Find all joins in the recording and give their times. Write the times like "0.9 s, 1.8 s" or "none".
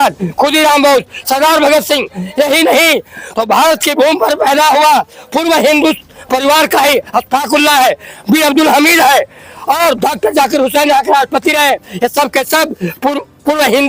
none